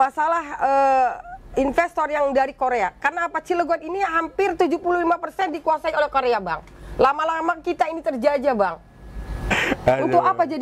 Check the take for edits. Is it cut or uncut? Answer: cut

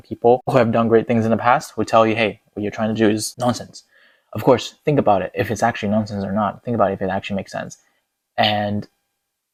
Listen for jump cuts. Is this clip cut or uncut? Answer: uncut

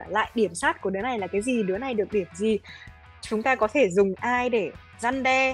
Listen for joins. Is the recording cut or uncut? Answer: uncut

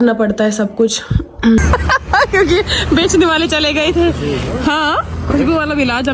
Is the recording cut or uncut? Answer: cut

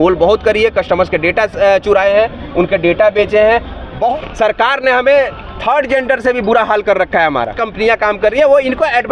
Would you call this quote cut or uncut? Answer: cut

